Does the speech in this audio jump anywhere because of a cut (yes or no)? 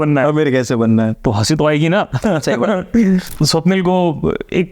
yes